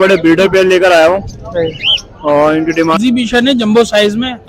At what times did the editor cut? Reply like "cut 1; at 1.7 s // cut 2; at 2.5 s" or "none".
cut 1; at 3.0 s